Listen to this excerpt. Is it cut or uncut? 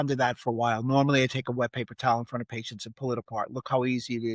uncut